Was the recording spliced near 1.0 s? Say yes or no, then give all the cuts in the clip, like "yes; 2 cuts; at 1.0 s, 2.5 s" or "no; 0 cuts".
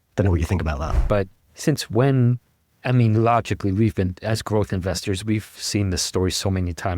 yes; 1 cut; at 1.0 s